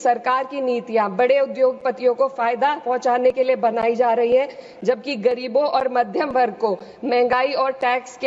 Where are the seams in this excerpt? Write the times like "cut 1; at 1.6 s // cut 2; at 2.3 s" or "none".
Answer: none